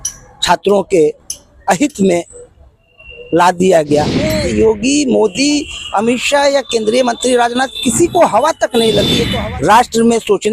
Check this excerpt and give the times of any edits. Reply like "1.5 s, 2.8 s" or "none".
4.3 s, 9.2 s